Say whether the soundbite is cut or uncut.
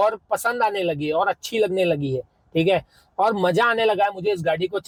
uncut